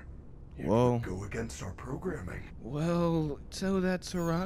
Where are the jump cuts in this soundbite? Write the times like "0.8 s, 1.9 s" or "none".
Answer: 2.5 s